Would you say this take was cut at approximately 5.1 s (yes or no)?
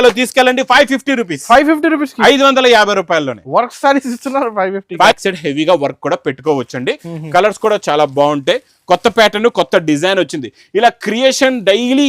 yes